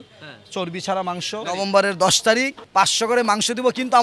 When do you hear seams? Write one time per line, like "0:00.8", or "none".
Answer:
0:01.5
0:02.6